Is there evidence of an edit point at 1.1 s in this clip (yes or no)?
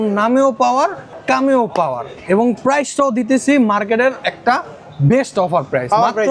yes